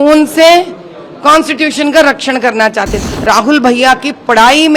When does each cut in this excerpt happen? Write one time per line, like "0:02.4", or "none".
0:03.0